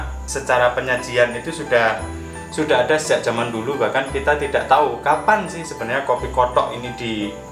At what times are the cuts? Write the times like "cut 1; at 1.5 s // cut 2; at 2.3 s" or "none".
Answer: none